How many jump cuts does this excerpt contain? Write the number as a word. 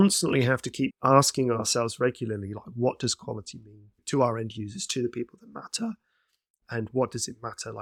zero